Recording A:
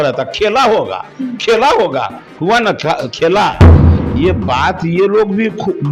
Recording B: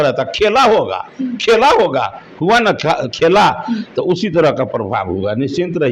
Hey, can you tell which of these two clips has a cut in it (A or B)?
A